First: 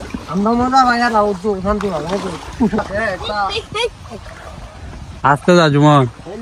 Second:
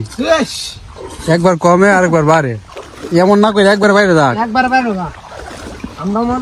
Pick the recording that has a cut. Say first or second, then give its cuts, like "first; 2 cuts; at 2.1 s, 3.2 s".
first; 1 cut; at 2.8 s